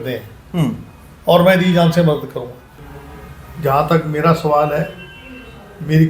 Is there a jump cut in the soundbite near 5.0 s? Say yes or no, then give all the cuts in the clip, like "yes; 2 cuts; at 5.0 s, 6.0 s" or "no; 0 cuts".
no; 1 cut; at 2.6 s